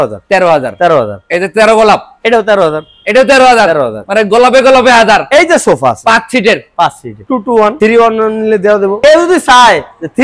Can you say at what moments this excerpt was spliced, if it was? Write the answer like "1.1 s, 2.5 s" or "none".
none